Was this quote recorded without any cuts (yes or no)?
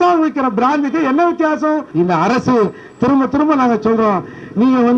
no